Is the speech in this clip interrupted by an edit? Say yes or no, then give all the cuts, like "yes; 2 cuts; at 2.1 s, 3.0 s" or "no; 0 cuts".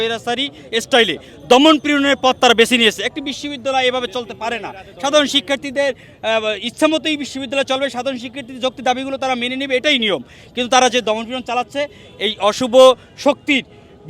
no; 0 cuts